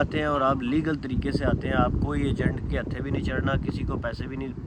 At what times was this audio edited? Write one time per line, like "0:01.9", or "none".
none

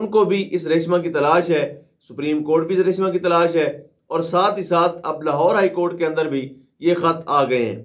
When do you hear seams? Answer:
none

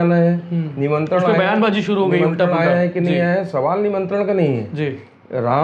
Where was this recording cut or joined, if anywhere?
none

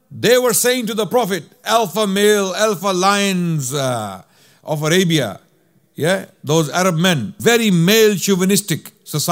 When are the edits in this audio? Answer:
0:01.5
0:07.3

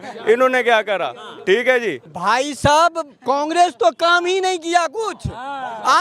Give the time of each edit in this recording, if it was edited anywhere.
0:02.0

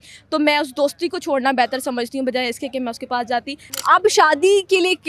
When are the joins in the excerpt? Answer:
0:03.6

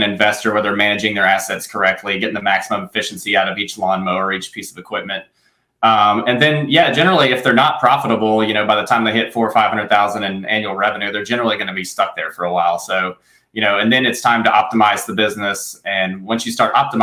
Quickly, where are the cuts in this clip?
none

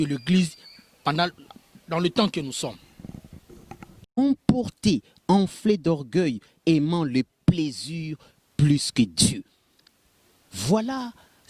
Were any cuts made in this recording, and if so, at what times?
0:04.2

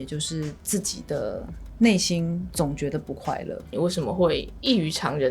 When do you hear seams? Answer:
0:02.5
0:03.7

